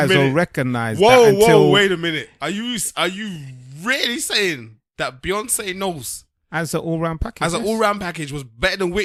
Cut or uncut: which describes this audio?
uncut